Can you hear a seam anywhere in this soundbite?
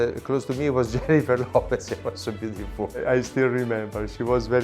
yes; 1 cut; at 3.0 s

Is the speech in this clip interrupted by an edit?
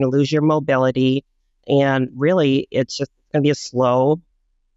no; 0 cuts

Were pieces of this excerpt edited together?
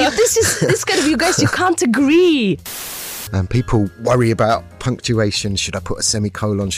yes; 2 cuts; at 2.8 s, 3.9 s

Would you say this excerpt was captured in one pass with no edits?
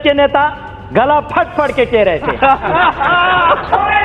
yes; 0 cuts

